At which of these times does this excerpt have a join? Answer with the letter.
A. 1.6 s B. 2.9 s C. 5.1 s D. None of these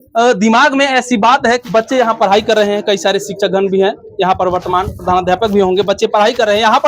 A